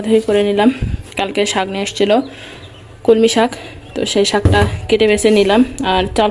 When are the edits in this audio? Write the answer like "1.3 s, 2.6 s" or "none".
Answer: none